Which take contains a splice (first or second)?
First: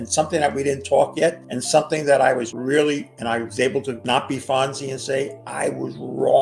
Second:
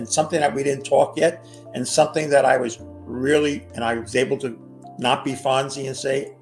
first